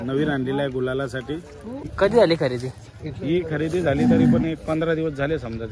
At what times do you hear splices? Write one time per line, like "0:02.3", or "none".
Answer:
0:01.9

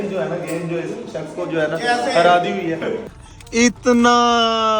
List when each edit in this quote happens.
0:03.1

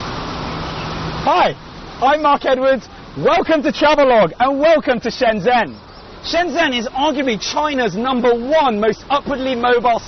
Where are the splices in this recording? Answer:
0:03.5

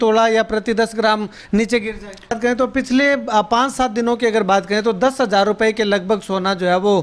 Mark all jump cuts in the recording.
0:02.4

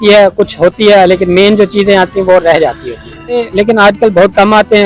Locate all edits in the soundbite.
0:03.5

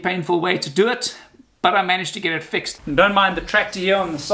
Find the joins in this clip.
0:02.7

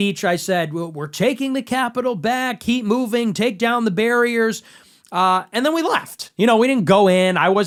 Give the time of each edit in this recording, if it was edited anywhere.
none

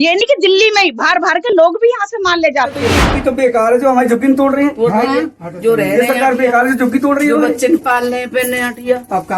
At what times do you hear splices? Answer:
0:03.1

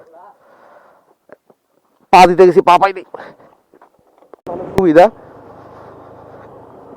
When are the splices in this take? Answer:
0:04.5

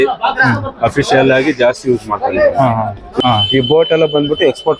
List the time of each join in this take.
0:03.2

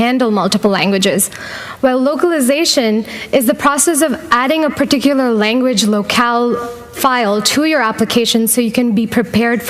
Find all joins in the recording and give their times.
0:04.0

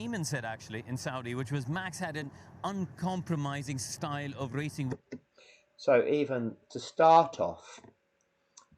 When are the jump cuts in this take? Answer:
none

